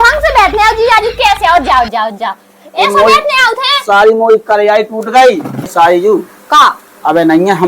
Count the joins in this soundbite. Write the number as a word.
one